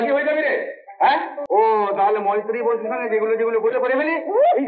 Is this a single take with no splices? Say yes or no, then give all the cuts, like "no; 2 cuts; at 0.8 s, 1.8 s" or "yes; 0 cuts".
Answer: no; 1 cut; at 1.4 s